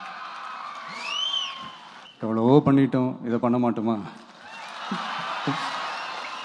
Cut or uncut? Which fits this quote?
cut